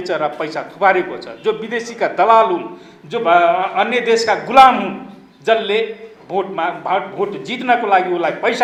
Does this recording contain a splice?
no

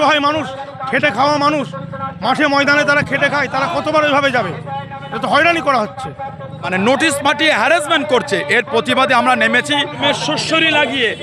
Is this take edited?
yes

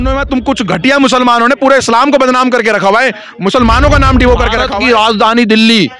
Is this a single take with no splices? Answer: no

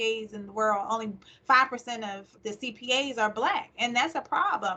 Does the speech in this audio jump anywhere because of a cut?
no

